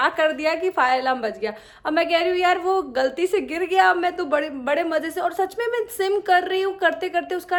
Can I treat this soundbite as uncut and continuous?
yes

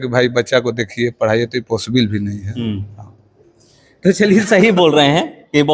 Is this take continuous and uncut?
yes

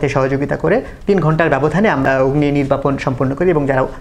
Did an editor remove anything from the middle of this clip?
yes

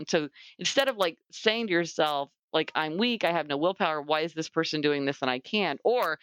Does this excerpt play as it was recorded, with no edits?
yes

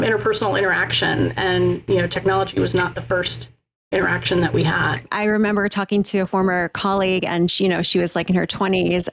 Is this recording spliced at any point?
yes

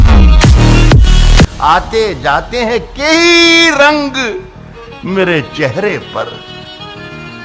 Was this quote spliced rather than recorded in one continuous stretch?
yes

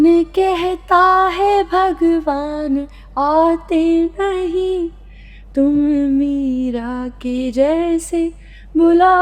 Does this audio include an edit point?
no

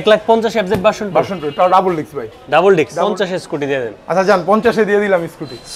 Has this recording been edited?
yes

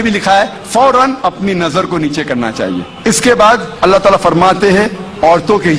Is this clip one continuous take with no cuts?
no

